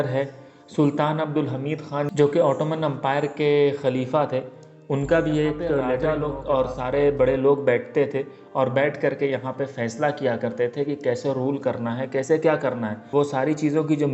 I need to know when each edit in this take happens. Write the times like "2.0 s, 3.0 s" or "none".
6.0 s